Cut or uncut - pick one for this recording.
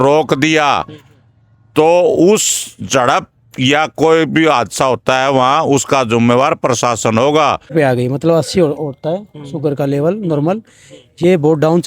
cut